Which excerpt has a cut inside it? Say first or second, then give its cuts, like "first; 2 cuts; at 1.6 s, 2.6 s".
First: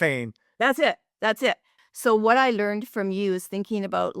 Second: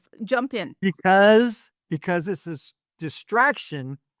first; 1 cut; at 1.7 s